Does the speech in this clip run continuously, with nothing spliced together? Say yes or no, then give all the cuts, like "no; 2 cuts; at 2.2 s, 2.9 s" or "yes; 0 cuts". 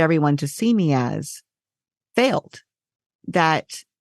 no; 1 cut; at 2.8 s